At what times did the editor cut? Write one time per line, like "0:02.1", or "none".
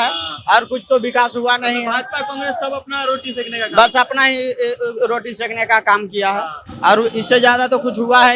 none